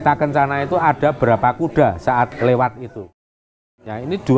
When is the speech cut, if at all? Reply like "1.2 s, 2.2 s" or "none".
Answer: 3.2 s